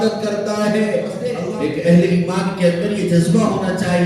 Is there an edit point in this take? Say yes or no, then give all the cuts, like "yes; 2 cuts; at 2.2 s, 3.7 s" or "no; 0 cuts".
yes; 1 cut; at 1.4 s